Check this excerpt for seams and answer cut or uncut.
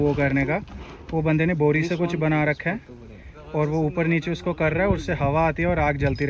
uncut